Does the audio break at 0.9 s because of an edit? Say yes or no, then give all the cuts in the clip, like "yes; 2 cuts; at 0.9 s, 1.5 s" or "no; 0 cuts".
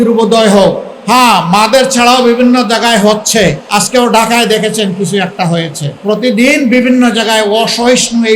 yes; 3 cuts; at 0.9 s, 3.6 s, 5.8 s